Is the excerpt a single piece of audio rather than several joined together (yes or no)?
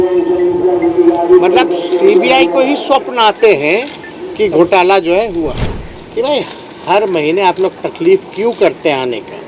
no